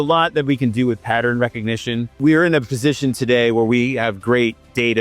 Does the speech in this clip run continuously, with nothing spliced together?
no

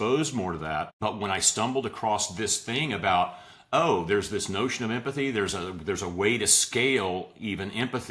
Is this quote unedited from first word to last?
no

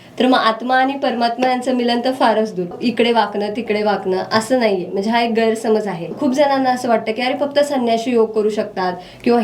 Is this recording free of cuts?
no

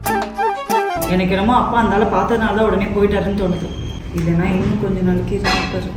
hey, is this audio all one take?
no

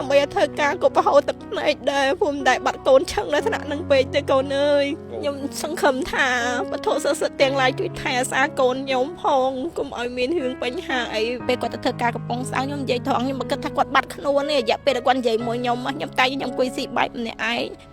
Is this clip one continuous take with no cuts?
no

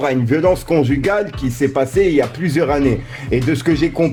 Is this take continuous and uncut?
yes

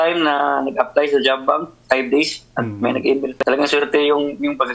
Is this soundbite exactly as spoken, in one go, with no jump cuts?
no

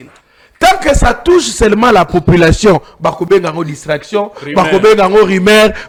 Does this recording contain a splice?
no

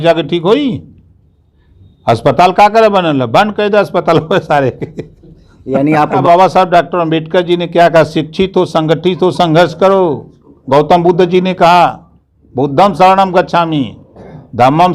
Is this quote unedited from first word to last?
no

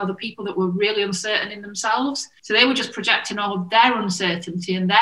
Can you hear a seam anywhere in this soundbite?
yes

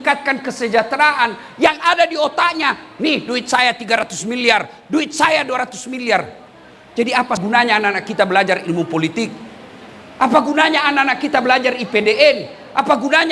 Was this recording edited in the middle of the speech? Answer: yes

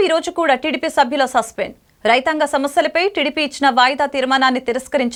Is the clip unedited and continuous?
yes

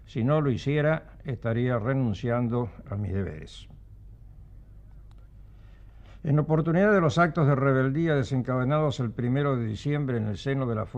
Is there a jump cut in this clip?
yes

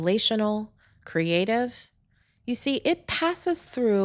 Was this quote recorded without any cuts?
yes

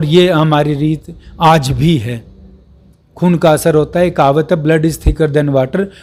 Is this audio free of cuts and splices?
yes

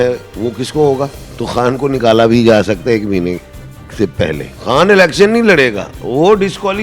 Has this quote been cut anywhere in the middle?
yes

